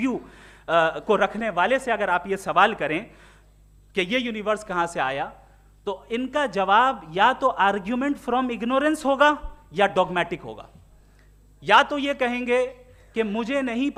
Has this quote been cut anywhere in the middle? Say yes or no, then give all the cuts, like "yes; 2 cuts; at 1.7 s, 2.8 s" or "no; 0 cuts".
no; 0 cuts